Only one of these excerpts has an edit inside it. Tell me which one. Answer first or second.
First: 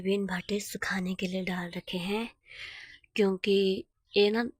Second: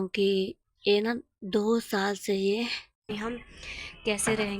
second